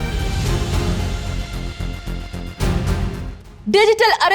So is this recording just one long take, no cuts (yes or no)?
yes